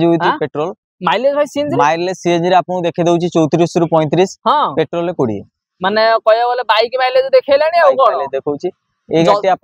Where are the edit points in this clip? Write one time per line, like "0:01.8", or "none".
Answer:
none